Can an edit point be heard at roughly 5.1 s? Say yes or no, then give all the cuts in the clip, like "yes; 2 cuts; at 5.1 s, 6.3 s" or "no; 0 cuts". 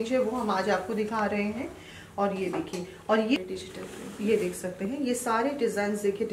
no; 1 cut; at 3.4 s